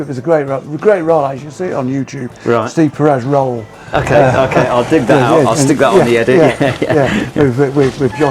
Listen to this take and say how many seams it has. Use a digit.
0